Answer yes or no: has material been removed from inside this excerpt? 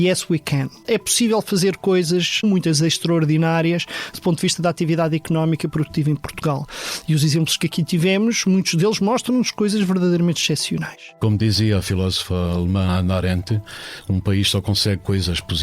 yes